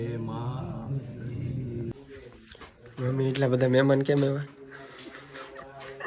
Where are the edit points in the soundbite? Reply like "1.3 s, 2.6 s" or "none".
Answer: 1.9 s